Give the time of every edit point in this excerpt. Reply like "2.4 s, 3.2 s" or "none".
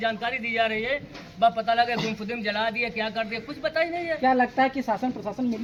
none